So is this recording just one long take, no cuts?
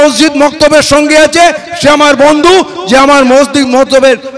yes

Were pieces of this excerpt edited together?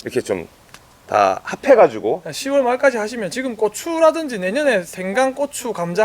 yes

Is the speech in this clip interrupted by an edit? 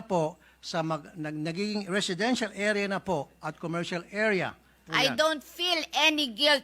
yes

